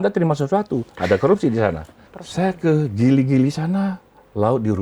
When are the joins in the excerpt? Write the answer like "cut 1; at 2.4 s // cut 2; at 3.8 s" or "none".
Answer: cut 1; at 1.9 s